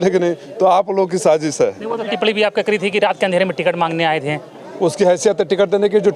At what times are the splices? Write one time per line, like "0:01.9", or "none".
0:02.0